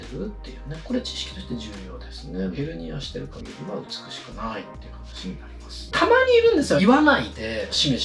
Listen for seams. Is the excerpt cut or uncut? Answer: cut